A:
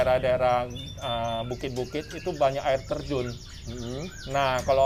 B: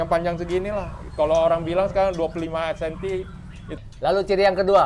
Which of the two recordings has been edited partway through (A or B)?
B